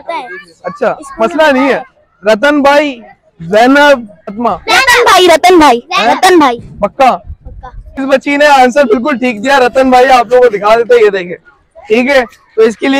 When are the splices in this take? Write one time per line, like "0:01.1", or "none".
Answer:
0:04.4
0:08.0